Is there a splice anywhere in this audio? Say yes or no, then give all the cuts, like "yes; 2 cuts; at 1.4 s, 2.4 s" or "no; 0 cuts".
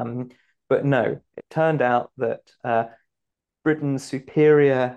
no; 0 cuts